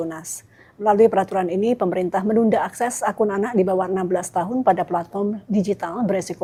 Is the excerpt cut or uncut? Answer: uncut